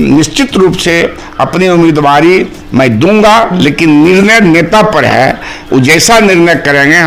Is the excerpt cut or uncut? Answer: uncut